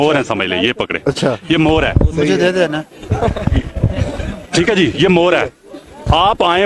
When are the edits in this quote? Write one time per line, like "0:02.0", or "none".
none